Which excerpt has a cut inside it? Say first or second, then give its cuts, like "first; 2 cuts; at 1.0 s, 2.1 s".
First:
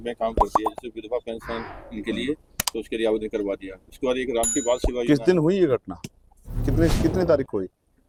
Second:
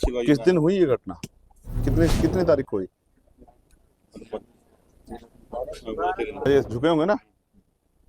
second; 1 cut; at 6.5 s